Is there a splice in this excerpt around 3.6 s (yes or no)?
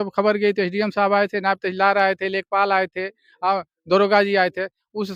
no